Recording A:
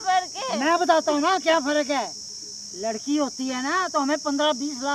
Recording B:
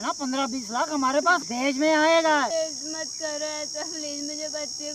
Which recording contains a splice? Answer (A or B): B